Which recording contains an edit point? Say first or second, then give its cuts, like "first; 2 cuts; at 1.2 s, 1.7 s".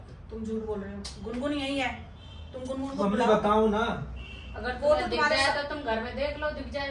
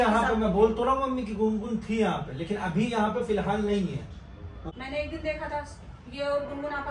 second; 1 cut; at 4.7 s